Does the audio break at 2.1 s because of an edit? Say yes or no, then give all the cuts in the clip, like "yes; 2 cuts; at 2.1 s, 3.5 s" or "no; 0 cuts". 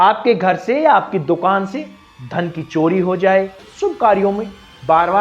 no; 1 cut; at 3.6 s